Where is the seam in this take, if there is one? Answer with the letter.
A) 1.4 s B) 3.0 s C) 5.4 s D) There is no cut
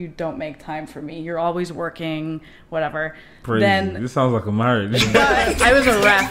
C